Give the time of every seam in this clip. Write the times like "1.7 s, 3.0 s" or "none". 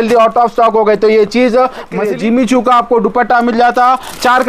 2.0 s